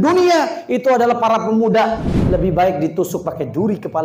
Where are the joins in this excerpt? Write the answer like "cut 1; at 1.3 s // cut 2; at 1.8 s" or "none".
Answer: cut 1; at 2.1 s